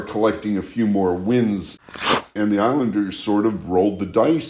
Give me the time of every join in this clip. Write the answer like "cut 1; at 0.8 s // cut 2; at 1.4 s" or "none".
cut 1; at 2.2 s